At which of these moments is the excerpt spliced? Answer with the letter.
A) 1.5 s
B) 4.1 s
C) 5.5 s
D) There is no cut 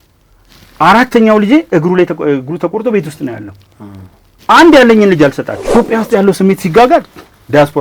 C